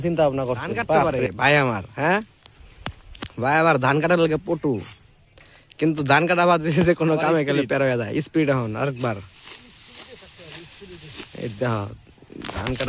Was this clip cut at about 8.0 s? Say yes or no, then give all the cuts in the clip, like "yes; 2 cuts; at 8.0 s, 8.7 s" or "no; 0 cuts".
no; 1 cut; at 1.0 s